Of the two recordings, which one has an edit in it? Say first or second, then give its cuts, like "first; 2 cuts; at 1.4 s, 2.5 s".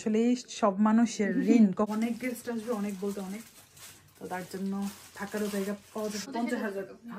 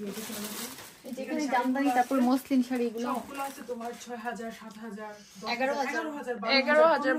first; 2 cuts; at 1.9 s, 6.3 s